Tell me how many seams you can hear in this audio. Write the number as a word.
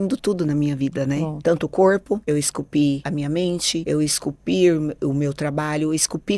three